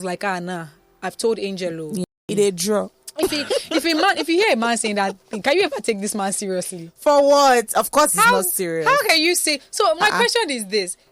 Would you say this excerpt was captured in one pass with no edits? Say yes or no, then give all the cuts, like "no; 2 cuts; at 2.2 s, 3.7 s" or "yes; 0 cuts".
no; 1 cut; at 2.1 s